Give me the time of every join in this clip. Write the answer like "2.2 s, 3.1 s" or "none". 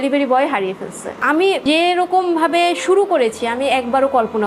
1.1 s